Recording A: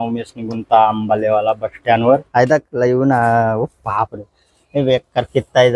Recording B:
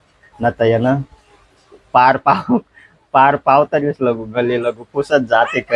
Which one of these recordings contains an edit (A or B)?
A